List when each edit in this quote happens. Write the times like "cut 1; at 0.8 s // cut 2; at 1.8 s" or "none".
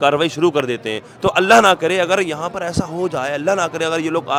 none